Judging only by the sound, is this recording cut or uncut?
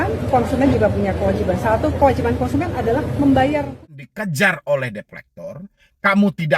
cut